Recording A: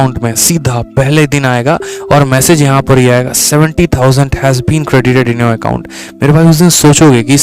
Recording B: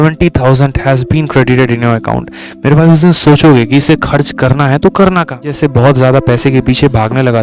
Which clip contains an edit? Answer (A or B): B